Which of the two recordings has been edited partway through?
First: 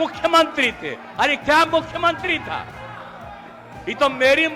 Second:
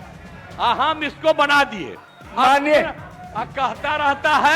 second; 1 cut; at 2.2 s

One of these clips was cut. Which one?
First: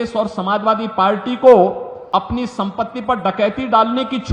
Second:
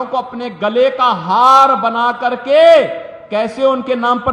first; 1 cut; at 1.9 s

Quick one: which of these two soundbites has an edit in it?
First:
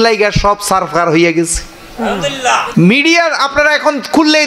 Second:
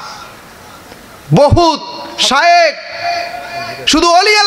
first; 1 cut; at 2.6 s

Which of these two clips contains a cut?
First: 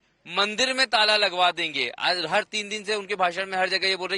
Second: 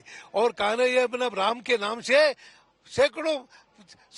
first; 1 cut; at 1.0 s

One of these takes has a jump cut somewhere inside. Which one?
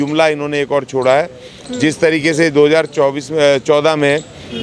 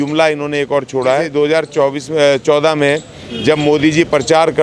second; 1 cut; at 1.3 s

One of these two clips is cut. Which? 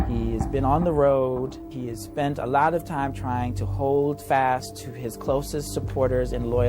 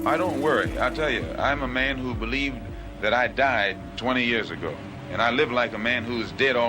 second; 1 cut; at 1.1 s

